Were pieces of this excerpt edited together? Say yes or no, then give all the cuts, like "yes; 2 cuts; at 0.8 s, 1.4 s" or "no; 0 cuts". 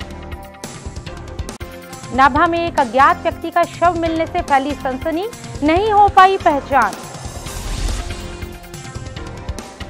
no; 0 cuts